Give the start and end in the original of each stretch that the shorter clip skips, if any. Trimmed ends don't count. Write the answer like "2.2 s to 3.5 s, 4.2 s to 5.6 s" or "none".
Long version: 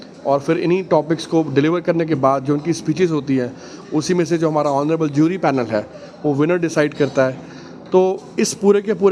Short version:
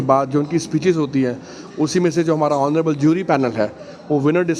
none